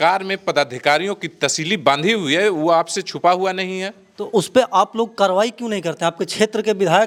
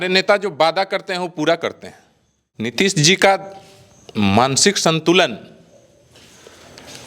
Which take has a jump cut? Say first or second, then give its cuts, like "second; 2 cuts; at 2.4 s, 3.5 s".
second; 1 cut; at 2.7 s